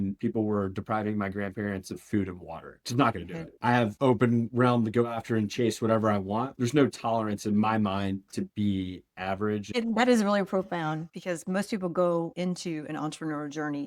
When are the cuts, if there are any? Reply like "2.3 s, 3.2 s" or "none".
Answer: 3.6 s, 9.7 s